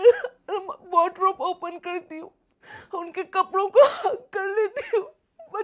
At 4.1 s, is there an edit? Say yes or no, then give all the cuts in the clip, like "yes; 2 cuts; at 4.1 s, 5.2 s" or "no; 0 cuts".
no; 0 cuts